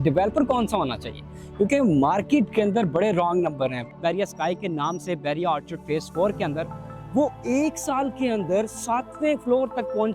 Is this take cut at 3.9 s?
yes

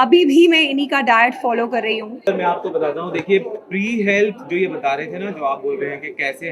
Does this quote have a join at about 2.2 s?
yes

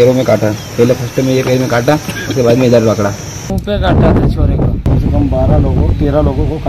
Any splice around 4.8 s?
yes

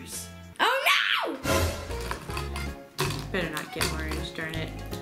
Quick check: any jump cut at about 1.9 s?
yes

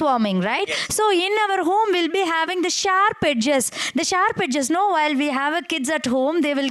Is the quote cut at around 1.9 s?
no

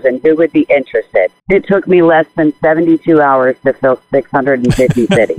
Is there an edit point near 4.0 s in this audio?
no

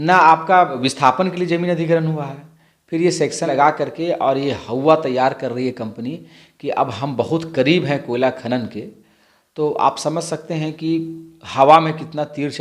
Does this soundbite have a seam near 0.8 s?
yes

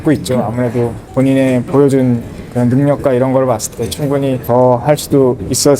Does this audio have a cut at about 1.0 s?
yes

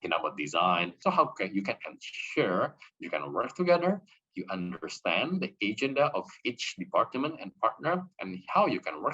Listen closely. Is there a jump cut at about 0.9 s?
yes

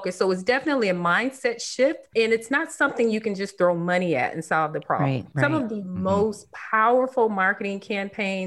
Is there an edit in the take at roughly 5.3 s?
no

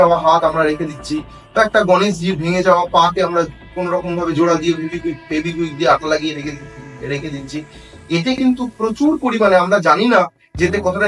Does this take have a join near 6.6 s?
no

